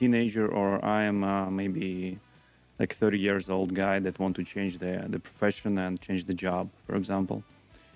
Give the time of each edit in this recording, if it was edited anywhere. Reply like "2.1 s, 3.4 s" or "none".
none